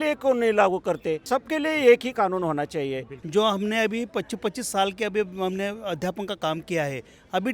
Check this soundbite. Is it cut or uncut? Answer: cut